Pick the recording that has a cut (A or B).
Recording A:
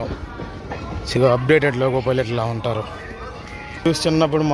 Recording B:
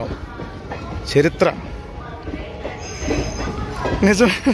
A